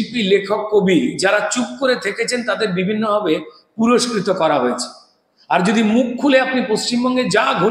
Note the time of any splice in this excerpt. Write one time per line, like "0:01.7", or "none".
none